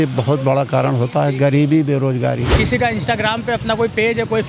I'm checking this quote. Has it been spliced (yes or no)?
yes